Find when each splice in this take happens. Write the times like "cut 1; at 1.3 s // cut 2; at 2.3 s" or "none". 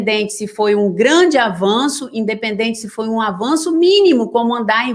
none